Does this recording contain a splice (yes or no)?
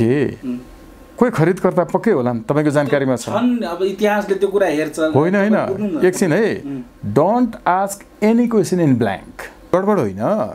yes